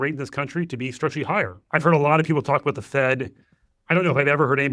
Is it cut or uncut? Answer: cut